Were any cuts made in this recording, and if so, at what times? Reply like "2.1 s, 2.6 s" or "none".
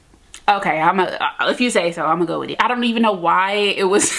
2.5 s